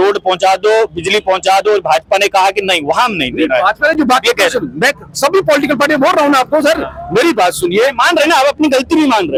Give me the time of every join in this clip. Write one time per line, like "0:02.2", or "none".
none